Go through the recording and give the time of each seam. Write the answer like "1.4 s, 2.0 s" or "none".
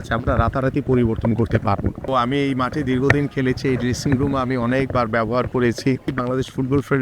2.0 s, 6.1 s

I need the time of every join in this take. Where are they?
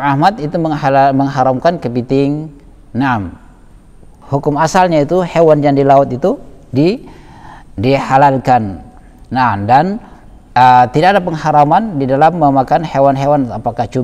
4.1 s

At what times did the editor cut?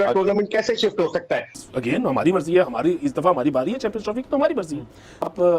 1.5 s

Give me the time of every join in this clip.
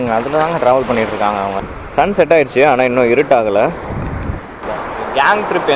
1.6 s, 4.7 s

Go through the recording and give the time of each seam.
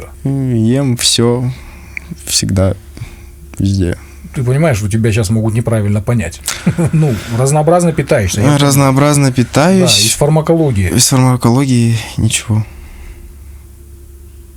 none

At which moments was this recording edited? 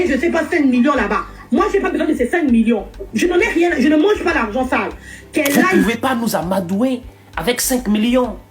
5.8 s

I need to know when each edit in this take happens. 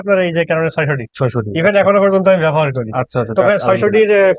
none

